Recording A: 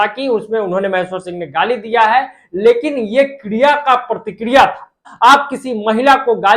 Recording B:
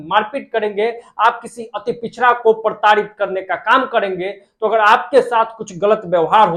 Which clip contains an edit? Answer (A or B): A